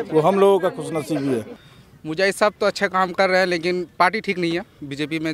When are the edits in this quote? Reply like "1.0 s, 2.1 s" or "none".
1.5 s